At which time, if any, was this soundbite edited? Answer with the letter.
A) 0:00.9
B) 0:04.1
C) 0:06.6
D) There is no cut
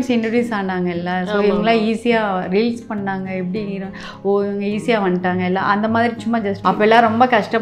C